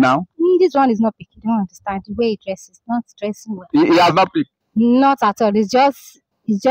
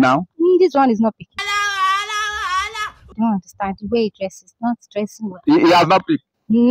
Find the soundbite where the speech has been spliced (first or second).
first